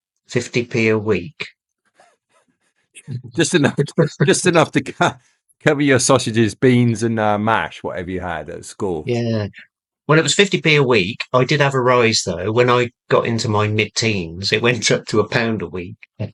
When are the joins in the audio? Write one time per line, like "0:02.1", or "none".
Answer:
none

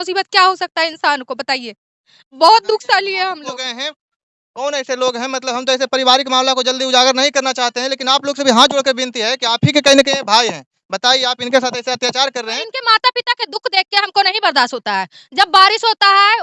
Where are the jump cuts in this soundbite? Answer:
0:12.8

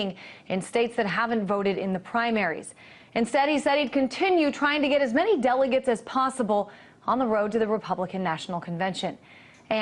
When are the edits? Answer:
0:08.4

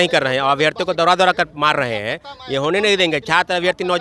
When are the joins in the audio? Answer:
none

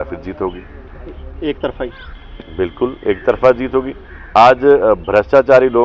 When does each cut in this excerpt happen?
none

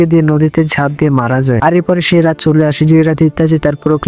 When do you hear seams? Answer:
0:01.6

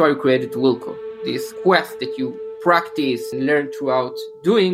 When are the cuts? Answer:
0:01.5
0:03.3

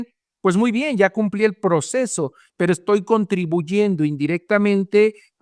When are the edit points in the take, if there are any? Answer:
none

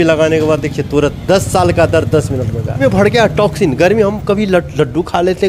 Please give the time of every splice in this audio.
0:02.8

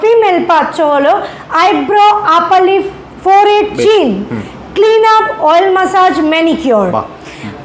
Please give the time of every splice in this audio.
none

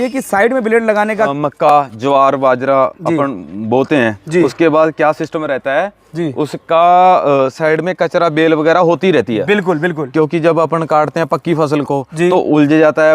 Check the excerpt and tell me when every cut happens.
0:01.3

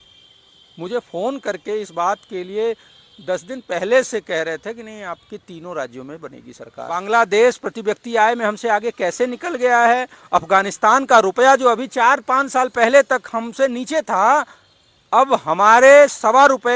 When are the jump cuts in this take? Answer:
0:07.0

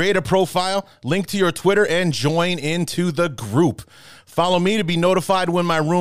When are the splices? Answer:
none

